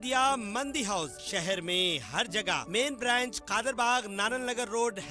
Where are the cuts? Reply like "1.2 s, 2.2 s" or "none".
none